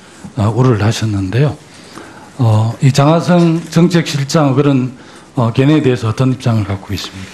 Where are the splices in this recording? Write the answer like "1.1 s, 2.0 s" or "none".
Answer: 3.1 s